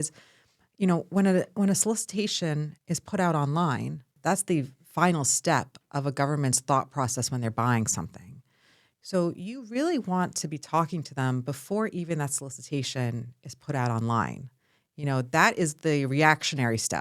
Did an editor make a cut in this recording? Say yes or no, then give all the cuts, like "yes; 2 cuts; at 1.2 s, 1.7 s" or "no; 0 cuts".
yes; 1 cut; at 4.1 s